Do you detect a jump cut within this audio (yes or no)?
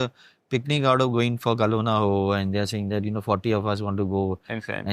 no